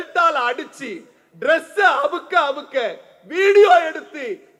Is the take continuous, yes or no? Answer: yes